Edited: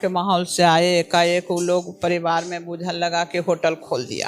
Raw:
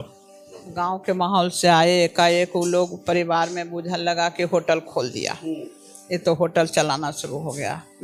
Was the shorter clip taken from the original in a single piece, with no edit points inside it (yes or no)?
yes